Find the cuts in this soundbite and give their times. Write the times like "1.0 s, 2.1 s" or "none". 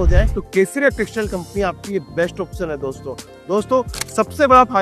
none